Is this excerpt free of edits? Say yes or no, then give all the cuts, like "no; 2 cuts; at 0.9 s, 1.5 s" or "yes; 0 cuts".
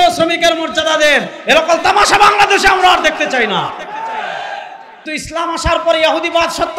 no; 1 cut; at 5.0 s